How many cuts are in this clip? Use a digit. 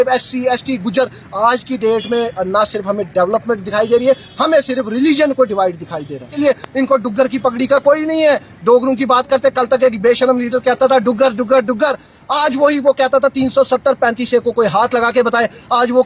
1